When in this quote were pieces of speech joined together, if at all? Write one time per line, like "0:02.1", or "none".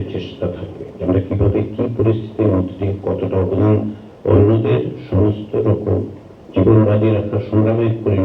0:00.9